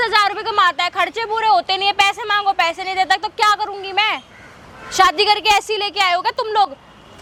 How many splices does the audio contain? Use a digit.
0